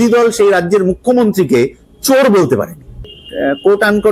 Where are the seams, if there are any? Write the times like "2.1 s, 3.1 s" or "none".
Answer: 3.2 s